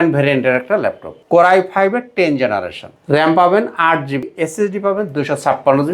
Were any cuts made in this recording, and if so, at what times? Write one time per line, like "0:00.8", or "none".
0:01.1
0:02.9
0:04.3